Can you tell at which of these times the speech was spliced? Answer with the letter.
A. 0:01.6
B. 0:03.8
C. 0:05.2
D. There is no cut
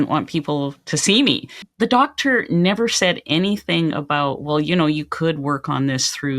A